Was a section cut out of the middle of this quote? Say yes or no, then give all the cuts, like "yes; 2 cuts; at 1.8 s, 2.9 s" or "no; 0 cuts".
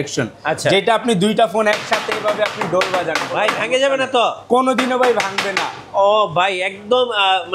no; 0 cuts